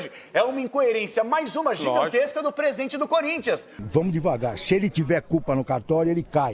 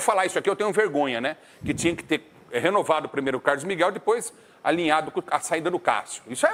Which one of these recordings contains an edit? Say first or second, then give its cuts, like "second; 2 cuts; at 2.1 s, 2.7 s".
first; 1 cut; at 3.8 s